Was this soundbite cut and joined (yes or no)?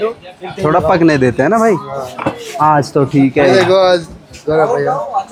no